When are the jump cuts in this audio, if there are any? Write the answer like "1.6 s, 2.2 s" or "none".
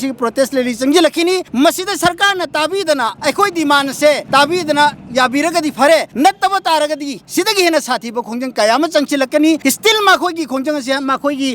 1.5 s, 3.1 s, 4.2 s, 6.1 s, 9.6 s

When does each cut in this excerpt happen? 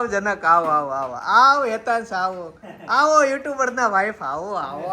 none

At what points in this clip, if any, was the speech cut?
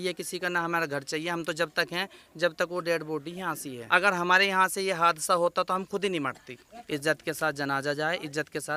3.7 s, 6.7 s

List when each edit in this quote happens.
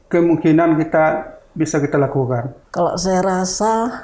2.6 s

